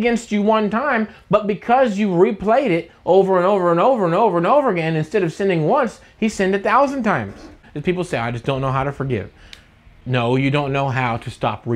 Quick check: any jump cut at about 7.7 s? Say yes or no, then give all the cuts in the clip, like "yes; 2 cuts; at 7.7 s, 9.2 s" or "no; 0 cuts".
yes; 2 cuts; at 7.7 s, 10.0 s